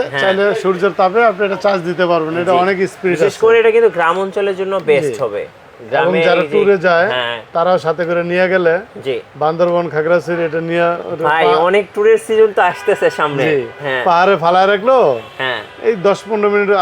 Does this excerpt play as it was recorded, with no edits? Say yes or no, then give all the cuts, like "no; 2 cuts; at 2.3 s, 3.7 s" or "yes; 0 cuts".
yes; 0 cuts